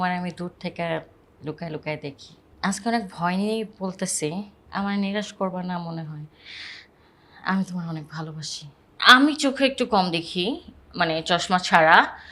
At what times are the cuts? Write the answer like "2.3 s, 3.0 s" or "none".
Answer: 4.6 s, 8.9 s

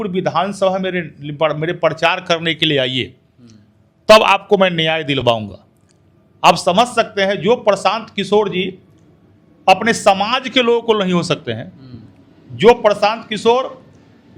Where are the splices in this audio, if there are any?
none

